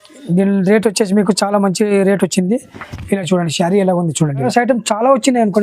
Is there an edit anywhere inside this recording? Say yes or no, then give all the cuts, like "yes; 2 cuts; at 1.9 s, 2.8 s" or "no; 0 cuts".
yes; 1 cut; at 4.4 s